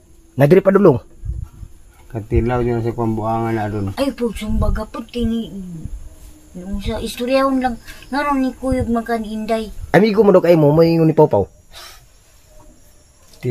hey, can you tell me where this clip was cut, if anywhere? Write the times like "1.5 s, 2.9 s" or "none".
3.9 s, 9.8 s